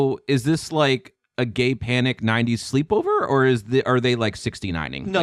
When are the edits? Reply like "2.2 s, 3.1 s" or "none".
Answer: none

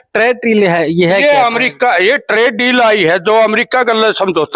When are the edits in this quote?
none

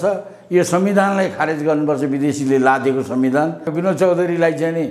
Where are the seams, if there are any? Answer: 3.7 s

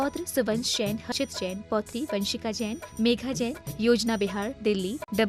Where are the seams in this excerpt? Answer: 1.1 s

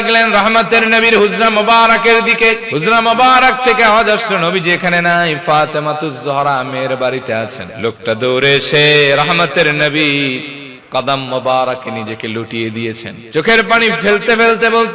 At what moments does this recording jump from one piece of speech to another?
2.6 s, 7.6 s, 13.1 s

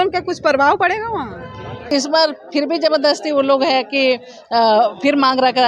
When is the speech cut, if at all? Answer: 1.9 s

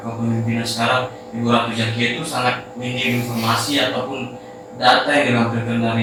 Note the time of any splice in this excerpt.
none

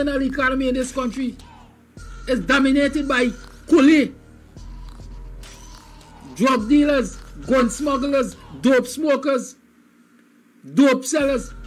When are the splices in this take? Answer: none

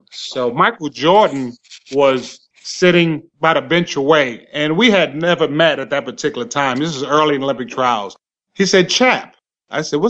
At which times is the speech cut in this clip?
none

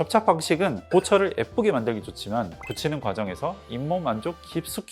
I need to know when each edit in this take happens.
none

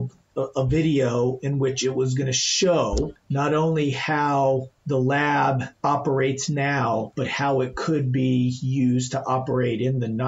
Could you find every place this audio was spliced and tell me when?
3.2 s, 4.7 s, 5.7 s

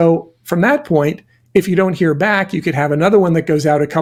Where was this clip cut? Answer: none

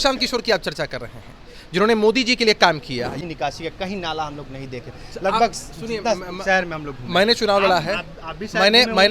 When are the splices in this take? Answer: 3.1 s

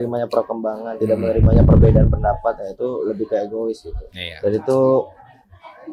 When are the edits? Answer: none

